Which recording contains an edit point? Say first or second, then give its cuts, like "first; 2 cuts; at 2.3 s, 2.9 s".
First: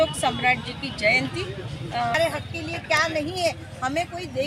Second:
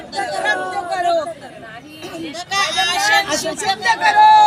first; 1 cut; at 2.1 s